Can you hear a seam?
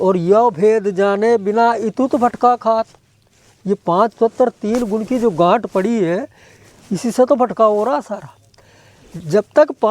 no; 0 cuts

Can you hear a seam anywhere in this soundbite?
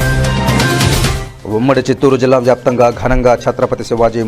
no; 0 cuts

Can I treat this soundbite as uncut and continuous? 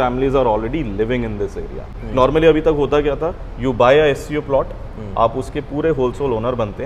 no; 1 cut; at 1.9 s

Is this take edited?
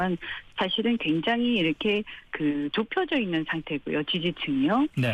no; 0 cuts

